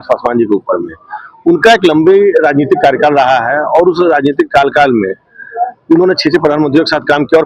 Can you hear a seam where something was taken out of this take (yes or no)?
no